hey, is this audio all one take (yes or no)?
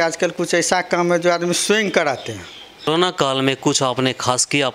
no